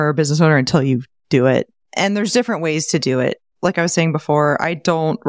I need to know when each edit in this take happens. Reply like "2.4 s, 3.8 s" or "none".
1.8 s, 3.5 s